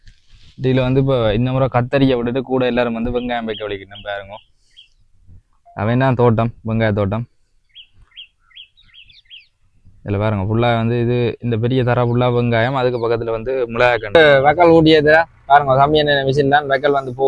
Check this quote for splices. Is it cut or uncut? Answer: cut